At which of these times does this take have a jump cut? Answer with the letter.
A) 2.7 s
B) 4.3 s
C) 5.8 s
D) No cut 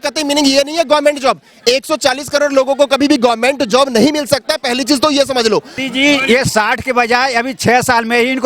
C